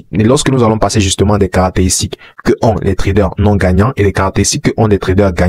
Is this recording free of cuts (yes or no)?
yes